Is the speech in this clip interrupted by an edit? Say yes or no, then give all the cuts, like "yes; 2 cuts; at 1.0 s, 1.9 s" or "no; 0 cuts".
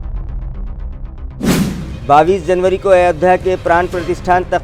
no; 0 cuts